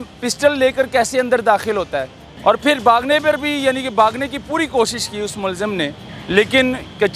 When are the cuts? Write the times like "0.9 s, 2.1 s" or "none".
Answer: 2.2 s